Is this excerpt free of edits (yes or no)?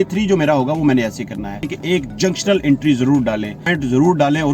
no